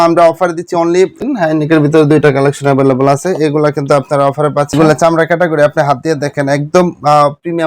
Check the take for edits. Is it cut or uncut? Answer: cut